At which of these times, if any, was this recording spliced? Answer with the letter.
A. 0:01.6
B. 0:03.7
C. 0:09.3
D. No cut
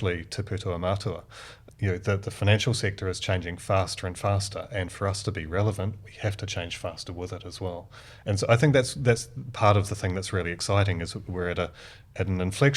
A